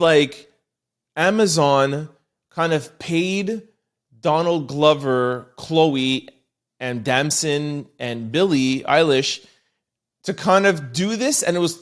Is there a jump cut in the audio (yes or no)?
no